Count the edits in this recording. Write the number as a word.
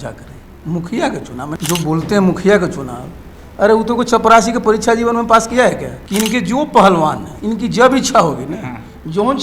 three